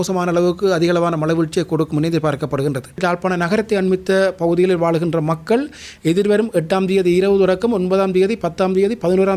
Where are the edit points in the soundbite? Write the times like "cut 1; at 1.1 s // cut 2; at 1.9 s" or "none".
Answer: cut 1; at 3.0 s